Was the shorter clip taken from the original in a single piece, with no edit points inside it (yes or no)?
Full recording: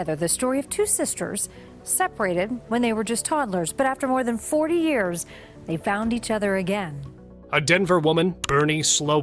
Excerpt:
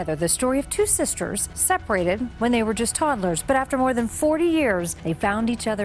no